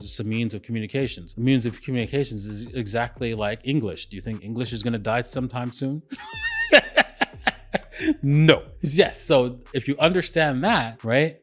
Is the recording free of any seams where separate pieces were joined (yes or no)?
yes